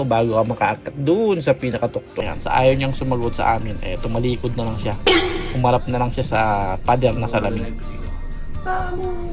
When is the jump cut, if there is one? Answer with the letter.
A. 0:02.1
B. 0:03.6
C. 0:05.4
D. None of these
A